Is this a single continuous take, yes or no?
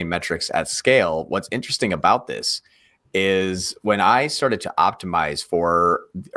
yes